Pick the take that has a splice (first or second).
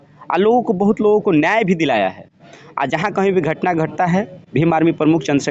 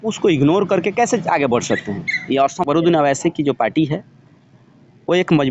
second